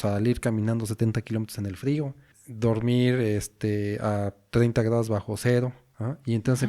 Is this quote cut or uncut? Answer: uncut